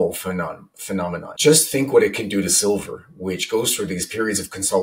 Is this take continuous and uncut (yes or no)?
no